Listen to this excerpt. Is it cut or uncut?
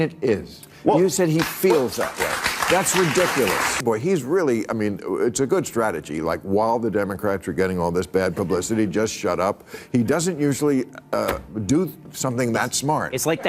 cut